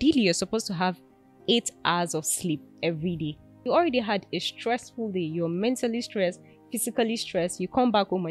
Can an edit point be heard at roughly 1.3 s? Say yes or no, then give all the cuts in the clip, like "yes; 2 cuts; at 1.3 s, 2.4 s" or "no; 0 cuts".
no; 1 cut; at 3.6 s